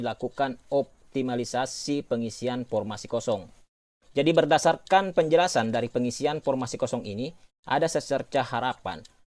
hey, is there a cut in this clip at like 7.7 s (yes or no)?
no